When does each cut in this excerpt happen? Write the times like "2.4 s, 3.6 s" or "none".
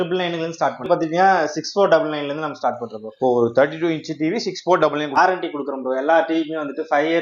0.8 s, 5.2 s